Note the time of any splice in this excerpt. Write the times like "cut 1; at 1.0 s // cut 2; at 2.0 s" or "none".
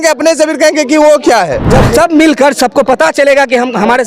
cut 1; at 1.6 s